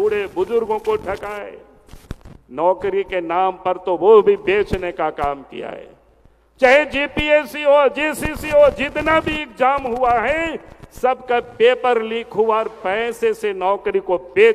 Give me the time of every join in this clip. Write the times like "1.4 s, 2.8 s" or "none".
none

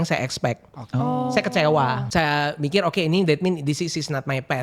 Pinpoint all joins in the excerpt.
2.0 s

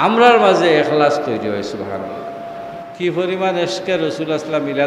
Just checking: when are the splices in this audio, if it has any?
2.9 s

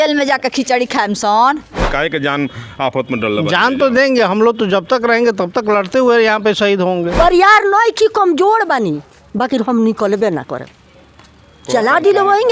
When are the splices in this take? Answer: 1.8 s, 7.1 s

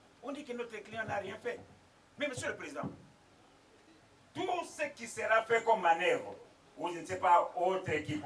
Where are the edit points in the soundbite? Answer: none

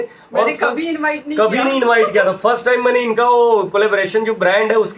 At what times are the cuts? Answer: none

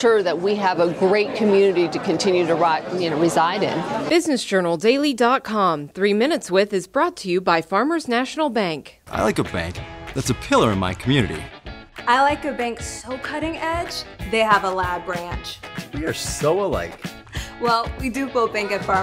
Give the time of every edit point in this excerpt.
none

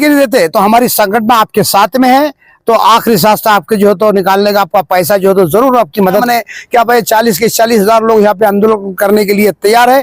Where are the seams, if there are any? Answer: 6.2 s

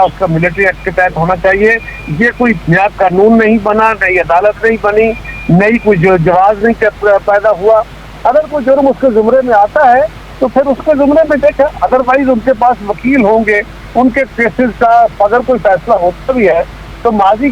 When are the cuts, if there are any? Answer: none

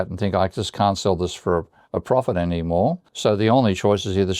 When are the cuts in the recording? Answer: 3.1 s

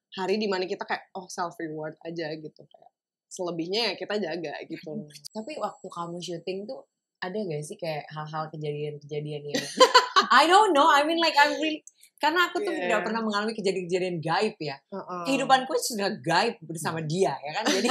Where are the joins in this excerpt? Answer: 5.1 s

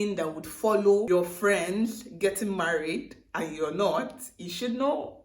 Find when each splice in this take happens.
1.0 s

